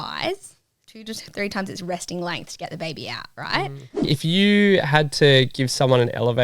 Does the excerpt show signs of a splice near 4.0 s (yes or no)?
yes